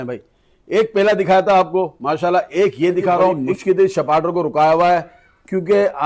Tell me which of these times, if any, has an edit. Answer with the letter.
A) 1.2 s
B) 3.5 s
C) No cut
B